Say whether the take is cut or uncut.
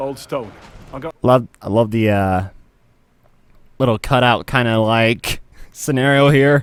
uncut